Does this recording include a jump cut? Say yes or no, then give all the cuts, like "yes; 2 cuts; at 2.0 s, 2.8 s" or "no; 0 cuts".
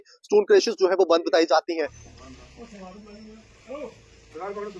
yes; 1 cut; at 2.0 s